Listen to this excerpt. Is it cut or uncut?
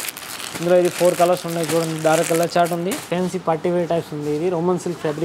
cut